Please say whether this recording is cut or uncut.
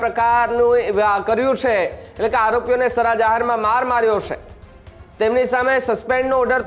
uncut